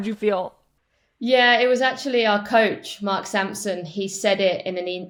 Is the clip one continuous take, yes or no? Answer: yes